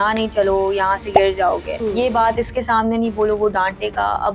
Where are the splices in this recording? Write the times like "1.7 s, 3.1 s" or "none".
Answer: 1.7 s